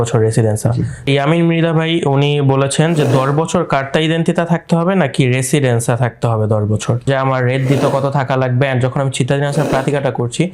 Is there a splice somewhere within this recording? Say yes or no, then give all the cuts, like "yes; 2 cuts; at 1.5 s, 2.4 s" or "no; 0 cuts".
yes; 2 cuts; at 1.1 s, 7.1 s